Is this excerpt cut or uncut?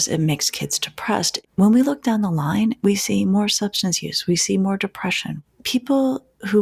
cut